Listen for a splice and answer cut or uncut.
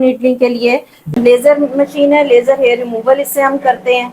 cut